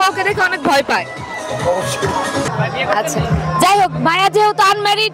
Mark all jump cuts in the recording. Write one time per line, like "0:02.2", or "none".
0:02.5